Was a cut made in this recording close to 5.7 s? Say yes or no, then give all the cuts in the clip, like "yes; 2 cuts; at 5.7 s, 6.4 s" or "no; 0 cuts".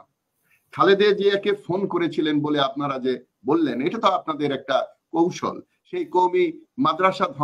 yes; 1 cut; at 5.7 s